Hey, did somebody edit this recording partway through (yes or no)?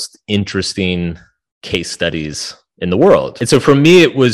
yes